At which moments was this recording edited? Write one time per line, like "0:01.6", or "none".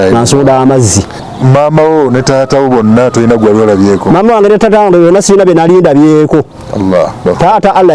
0:01.1

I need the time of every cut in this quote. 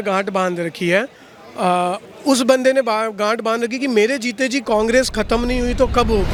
none

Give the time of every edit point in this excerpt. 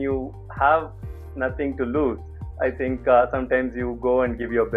none

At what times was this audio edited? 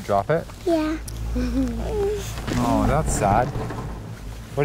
0:01.4

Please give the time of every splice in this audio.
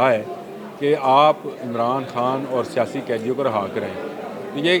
none

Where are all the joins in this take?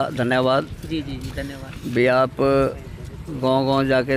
none

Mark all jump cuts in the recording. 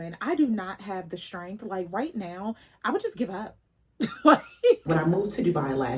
0:04.8

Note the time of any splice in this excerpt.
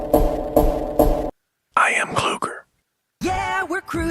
0:01.2

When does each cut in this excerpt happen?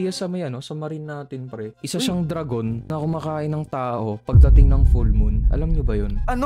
none

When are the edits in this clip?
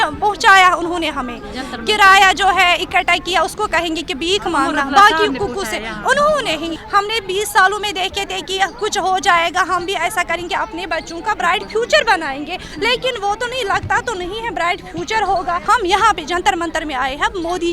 0:06.8
0:15.6

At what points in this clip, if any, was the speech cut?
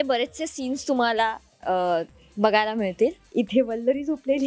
0:03.2

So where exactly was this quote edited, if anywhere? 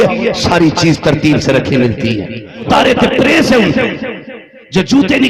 0:02.7

